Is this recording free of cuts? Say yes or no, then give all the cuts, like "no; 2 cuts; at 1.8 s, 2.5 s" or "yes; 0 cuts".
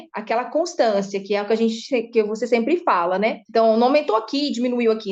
yes; 0 cuts